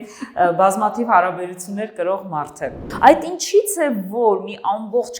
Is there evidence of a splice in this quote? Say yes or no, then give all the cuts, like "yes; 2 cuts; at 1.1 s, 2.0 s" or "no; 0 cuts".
yes; 1 cut; at 2.9 s